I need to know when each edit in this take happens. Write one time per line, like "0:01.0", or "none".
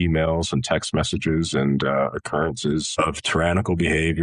0:03.0